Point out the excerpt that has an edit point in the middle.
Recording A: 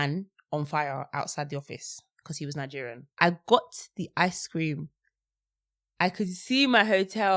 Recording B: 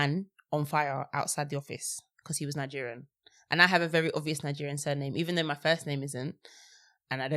A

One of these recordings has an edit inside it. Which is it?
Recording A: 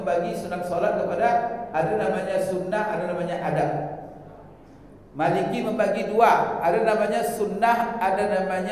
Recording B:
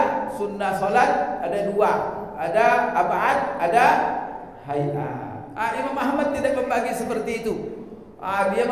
B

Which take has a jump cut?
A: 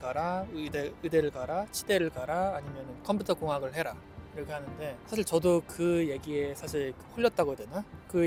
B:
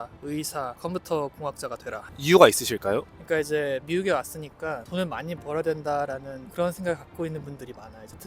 B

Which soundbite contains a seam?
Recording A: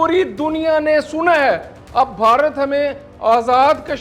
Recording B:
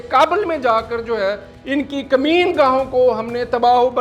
A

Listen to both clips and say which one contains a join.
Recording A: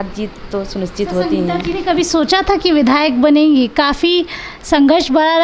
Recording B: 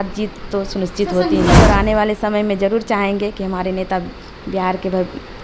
B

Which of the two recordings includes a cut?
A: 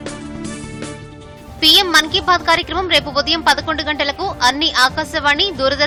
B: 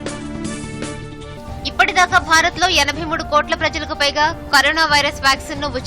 B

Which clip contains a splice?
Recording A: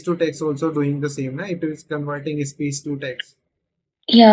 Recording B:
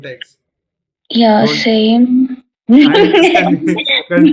B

